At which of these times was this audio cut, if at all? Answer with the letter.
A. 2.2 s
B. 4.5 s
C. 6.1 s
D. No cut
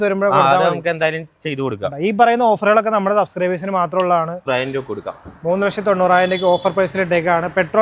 B